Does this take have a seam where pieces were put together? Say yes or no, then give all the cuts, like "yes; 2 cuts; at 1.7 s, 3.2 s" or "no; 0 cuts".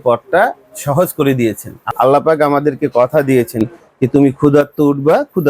yes; 1 cut; at 1.8 s